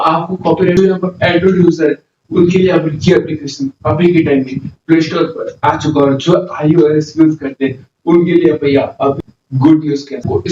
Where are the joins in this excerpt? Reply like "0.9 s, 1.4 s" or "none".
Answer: 0.8 s, 9.2 s

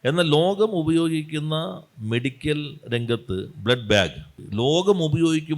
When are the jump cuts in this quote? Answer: 4.4 s

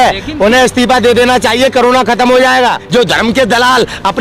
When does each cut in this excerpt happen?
2.8 s

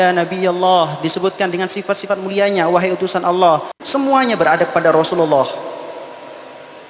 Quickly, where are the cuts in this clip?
3.8 s

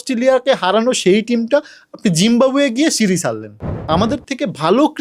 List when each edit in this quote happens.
3.8 s

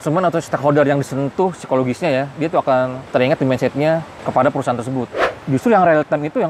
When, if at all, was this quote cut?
3.0 s, 4.2 s, 5.3 s

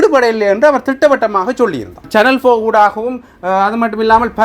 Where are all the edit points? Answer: 2.1 s

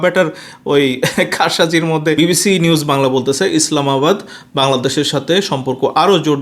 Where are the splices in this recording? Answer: 2.2 s

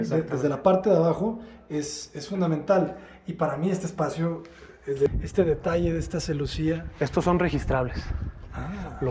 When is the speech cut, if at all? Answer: 5.1 s

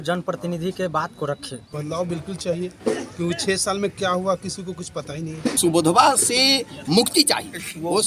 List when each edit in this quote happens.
1.6 s, 5.6 s

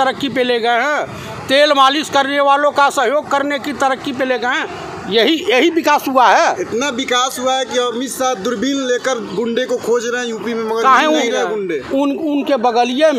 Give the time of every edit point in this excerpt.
none

